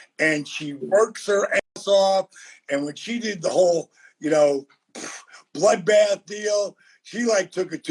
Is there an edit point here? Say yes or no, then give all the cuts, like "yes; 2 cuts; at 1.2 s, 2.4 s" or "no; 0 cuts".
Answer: no; 0 cuts